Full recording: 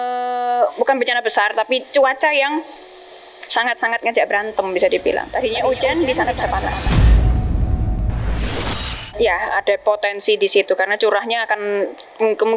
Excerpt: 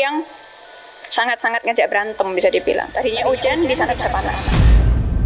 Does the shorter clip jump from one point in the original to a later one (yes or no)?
no